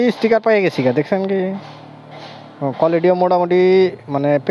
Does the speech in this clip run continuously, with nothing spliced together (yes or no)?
yes